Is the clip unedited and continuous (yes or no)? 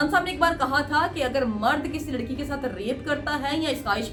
yes